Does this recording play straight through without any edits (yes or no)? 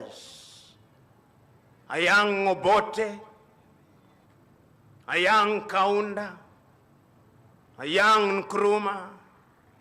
yes